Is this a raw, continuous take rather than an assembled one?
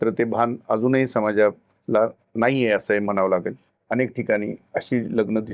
yes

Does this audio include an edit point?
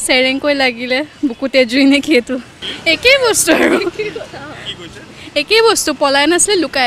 no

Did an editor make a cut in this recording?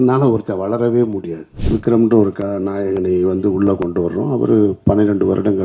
yes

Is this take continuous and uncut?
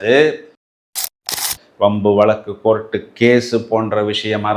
no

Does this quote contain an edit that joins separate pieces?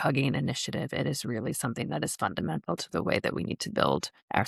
no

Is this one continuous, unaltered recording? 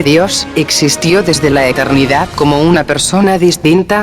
yes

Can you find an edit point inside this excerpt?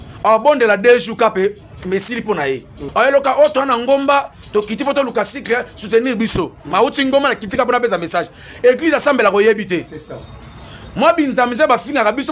yes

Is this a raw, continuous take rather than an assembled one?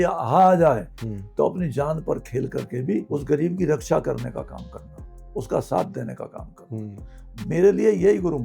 yes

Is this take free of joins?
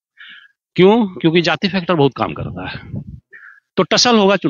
yes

